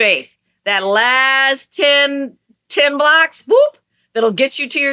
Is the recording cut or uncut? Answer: uncut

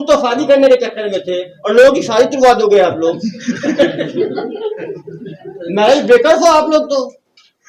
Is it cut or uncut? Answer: uncut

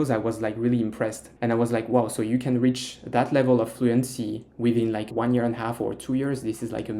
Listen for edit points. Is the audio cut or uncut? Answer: cut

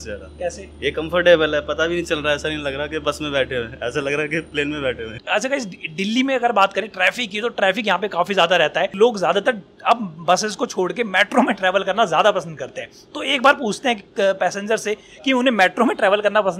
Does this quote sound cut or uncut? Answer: uncut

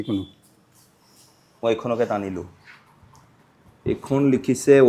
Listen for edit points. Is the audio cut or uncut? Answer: uncut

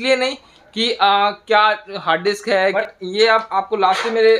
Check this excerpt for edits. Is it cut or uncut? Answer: cut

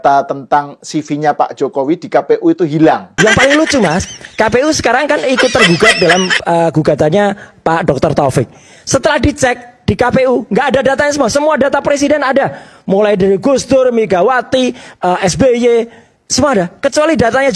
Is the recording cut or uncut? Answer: uncut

